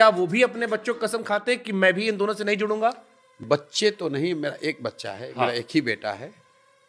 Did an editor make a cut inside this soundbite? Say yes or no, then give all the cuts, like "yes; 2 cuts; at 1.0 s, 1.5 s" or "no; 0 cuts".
no; 0 cuts